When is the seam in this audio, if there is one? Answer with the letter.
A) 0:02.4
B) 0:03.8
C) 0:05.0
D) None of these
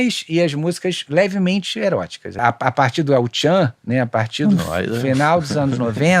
A